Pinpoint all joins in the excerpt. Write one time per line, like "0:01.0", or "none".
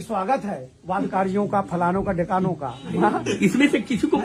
none